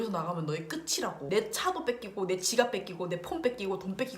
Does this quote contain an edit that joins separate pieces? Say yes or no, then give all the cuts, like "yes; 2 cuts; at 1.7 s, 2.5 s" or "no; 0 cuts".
yes; 1 cut; at 1.2 s